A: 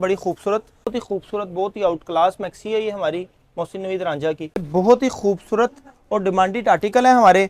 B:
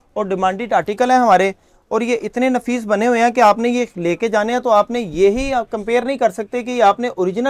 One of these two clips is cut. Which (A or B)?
A